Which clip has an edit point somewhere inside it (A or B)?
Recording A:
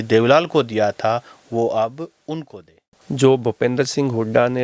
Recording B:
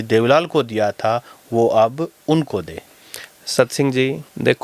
A